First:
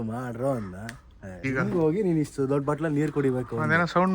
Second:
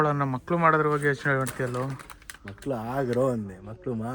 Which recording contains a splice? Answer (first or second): first